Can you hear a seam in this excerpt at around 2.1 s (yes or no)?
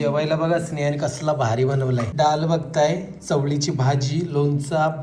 yes